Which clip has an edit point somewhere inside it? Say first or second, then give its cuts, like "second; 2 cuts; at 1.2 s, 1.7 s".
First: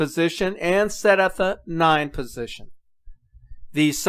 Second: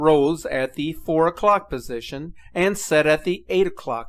first; 1 cut; at 1.0 s